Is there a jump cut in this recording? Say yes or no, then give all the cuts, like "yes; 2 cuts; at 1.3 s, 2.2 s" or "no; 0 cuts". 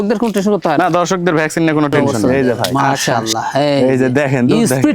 yes; 1 cut; at 2.1 s